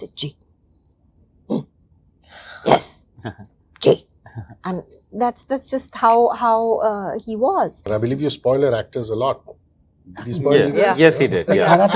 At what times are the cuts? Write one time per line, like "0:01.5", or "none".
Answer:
0:07.8